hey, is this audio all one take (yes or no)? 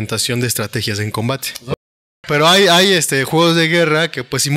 no